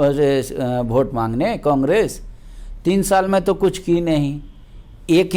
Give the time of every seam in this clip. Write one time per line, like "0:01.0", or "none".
none